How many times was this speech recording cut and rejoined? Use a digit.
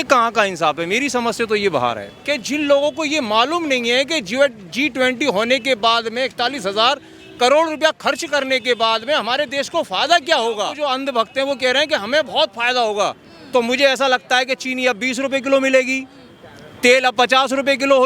2